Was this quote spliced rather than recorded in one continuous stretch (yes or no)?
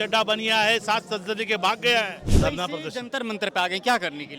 yes